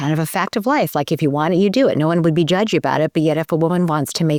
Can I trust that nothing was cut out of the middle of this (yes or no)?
yes